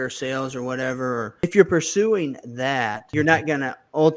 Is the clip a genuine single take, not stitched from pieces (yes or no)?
no